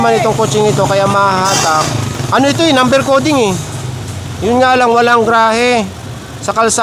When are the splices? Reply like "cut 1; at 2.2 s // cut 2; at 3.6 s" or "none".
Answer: none